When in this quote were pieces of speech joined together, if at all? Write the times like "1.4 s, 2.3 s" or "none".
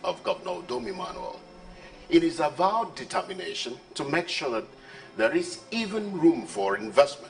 none